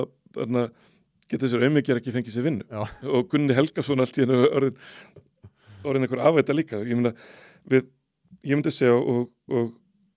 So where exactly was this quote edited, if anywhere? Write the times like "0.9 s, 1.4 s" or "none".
none